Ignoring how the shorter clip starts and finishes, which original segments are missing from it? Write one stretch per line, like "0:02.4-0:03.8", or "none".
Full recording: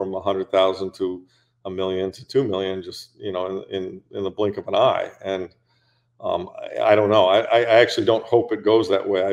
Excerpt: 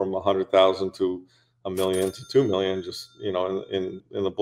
none

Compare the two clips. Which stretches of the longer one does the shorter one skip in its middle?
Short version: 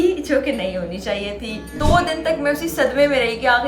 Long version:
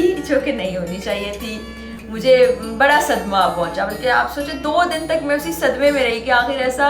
0:01.7-0:04.5

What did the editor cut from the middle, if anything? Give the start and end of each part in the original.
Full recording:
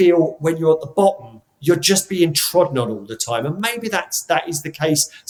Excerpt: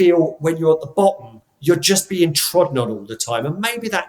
none

